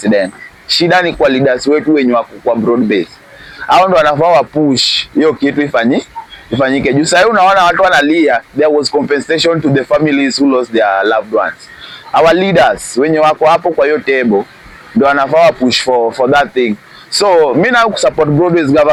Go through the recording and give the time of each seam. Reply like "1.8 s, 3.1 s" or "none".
none